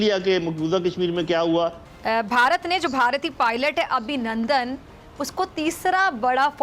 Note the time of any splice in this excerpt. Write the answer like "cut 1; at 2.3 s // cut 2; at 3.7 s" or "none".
cut 1; at 1.9 s